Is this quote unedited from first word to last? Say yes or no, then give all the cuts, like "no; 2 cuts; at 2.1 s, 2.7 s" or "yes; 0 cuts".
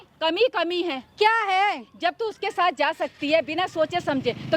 yes; 0 cuts